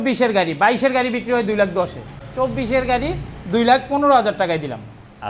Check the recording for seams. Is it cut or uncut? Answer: uncut